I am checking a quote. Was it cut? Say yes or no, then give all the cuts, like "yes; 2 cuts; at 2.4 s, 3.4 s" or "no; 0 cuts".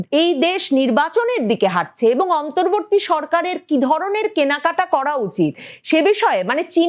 no; 0 cuts